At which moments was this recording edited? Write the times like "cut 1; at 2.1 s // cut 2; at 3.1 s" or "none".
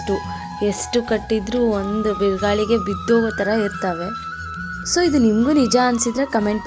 none